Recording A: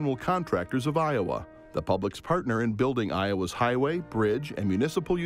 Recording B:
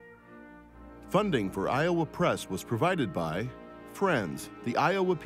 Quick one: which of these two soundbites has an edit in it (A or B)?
B